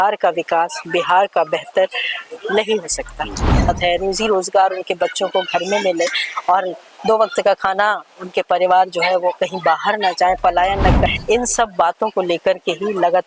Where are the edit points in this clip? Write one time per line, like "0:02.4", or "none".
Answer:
0:03.7
0:11.1